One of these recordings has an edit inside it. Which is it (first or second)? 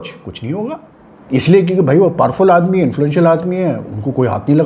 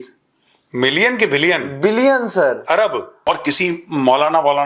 second